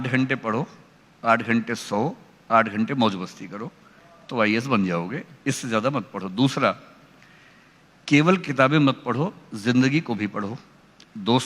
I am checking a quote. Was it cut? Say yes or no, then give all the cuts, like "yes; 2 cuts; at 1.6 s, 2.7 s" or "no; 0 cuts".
no; 0 cuts